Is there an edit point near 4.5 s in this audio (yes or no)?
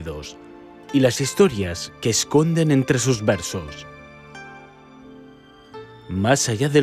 no